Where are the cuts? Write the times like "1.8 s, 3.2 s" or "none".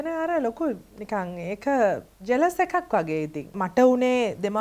0.9 s, 2.1 s, 3.6 s